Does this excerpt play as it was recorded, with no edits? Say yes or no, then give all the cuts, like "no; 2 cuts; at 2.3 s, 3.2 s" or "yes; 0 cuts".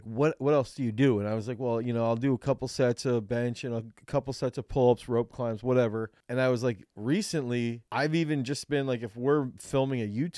no; 2 cuts; at 6.2 s, 7.8 s